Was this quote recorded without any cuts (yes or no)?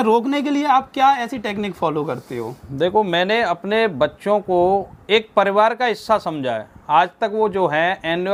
yes